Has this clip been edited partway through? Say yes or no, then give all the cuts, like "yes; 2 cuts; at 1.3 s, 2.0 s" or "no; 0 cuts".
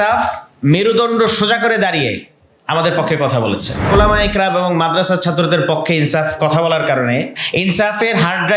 yes; 2 cuts; at 3.9 s, 7.4 s